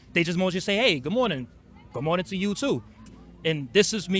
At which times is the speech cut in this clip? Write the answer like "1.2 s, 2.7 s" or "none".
3.0 s

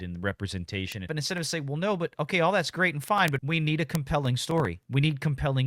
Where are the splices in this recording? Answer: 1.1 s, 3.4 s, 4.8 s

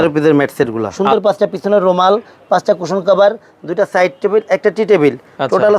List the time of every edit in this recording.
0.9 s

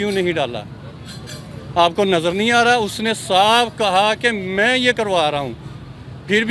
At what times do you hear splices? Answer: none

